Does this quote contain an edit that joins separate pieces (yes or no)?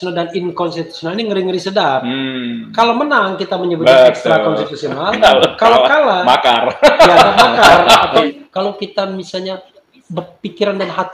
yes